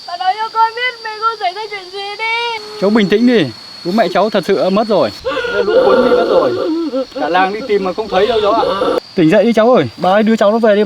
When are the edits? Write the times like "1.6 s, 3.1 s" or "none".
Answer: 2.7 s, 5.2 s, 9.0 s, 9.9 s